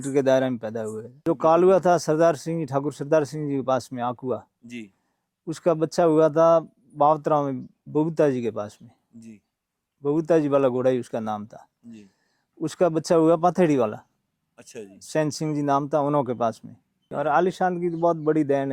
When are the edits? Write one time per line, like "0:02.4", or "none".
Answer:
0:01.1
0:17.0